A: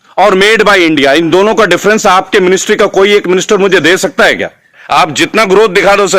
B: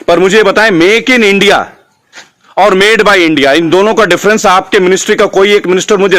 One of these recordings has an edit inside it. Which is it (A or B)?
A